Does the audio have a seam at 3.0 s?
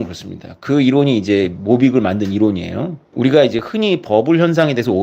yes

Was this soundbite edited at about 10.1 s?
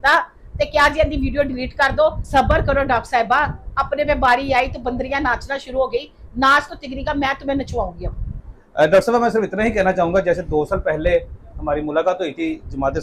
no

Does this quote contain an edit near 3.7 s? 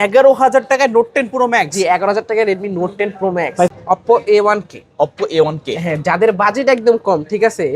yes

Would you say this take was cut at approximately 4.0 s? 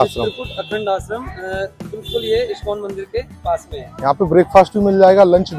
no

